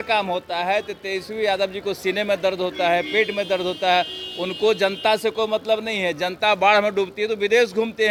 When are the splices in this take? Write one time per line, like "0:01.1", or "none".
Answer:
none